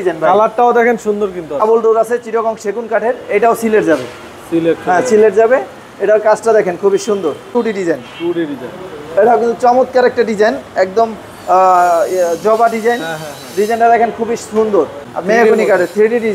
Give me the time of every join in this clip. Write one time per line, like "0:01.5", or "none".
0:01.8
0:07.5
0:15.1